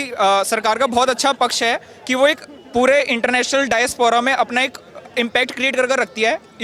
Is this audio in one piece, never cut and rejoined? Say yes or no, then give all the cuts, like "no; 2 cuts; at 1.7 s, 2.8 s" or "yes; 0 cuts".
yes; 0 cuts